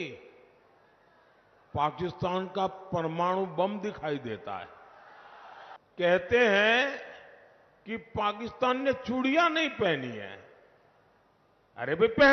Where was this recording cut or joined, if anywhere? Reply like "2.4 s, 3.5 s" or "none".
5.8 s